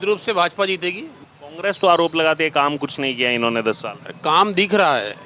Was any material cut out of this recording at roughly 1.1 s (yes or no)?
yes